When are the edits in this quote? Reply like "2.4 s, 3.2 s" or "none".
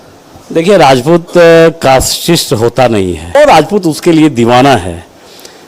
3.4 s